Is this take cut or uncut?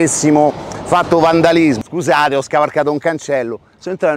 cut